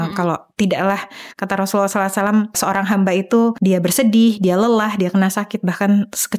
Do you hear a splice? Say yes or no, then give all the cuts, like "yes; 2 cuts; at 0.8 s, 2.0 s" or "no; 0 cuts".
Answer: yes; 2 cuts; at 2.6 s, 3.6 s